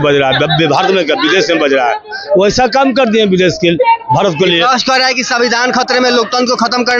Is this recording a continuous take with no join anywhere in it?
yes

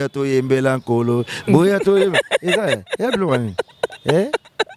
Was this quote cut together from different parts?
no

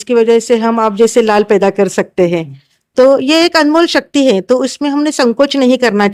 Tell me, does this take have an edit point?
no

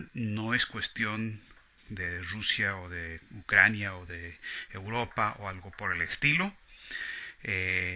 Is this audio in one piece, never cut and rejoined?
yes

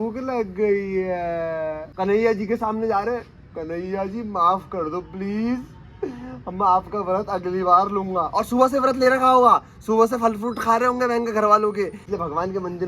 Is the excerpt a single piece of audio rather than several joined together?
no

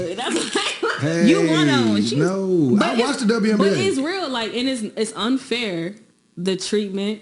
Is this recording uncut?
no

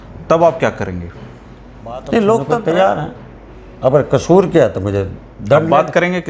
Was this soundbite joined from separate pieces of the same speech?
yes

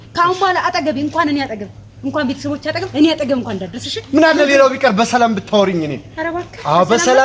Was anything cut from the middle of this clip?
no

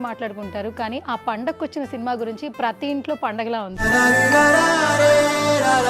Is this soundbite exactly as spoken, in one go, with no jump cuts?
no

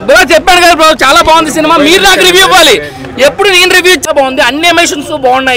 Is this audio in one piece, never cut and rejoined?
no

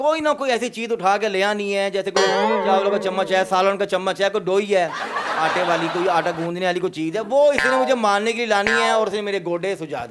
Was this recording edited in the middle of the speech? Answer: no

